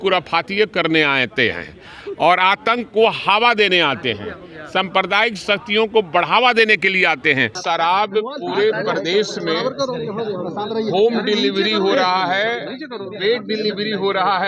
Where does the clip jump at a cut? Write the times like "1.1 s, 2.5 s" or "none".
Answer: 7.6 s

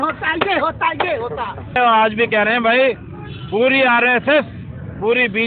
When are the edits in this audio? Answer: 1.8 s

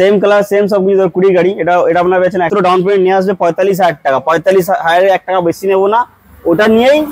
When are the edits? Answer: 2.5 s

